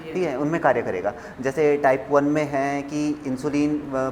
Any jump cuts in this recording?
no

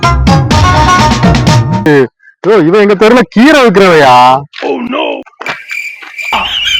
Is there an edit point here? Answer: yes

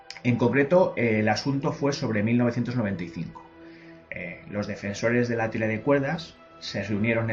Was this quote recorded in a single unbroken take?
yes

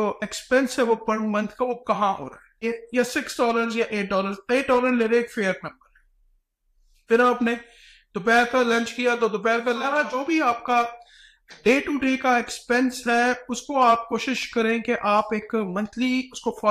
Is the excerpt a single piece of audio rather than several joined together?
no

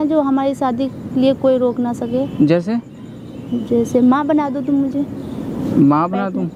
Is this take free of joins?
yes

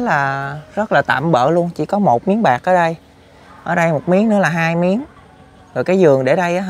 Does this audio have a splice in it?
no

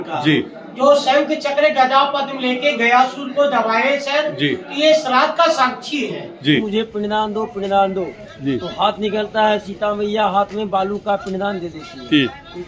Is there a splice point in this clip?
yes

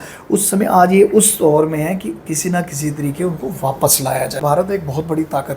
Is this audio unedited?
no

